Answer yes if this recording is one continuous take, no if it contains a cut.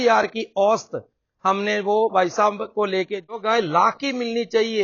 no